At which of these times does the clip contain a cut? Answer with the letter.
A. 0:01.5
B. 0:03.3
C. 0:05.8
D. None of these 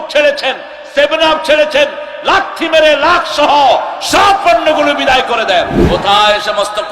C